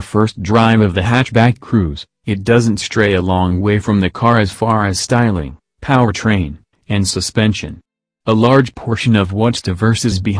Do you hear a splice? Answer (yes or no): no